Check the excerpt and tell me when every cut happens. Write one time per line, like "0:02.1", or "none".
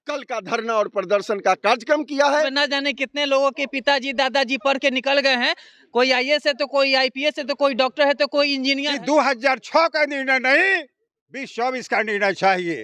0:02.5
0:08.9

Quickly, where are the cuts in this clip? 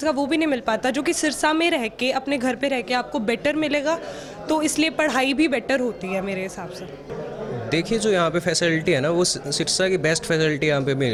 none

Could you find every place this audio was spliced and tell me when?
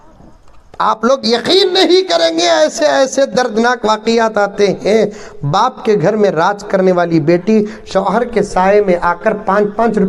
none

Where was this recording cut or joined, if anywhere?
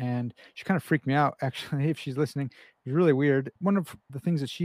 0:03.6

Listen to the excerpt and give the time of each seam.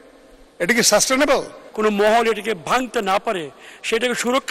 0:01.6

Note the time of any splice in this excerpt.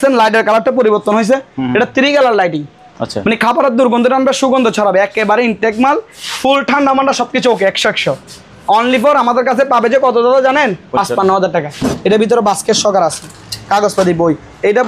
0:11.8

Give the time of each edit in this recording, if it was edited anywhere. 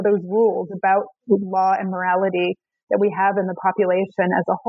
none

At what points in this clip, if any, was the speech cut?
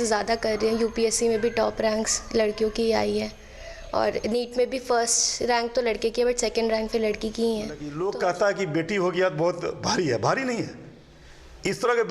0:07.9

